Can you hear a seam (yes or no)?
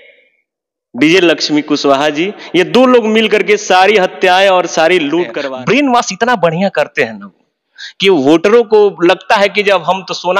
yes